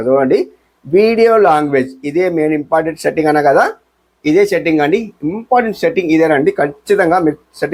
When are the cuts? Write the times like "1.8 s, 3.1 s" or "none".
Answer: none